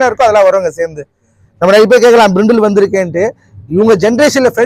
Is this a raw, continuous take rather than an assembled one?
yes; 0 cuts

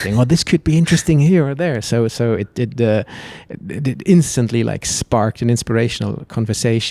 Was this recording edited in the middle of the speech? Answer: no; 0 cuts

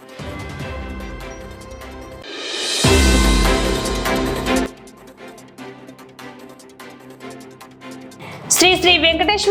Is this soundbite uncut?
yes; 0 cuts

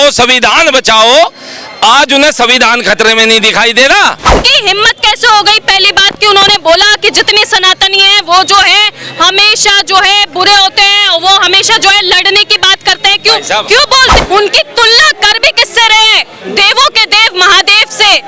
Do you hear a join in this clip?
yes; 2 cuts; at 4.3 s, 14.2 s

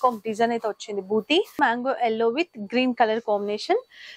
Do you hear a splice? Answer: yes; 1 cut; at 1.5 s

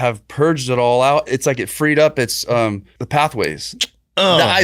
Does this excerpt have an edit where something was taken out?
yes; 2 cuts; at 1.3 s, 2.9 s

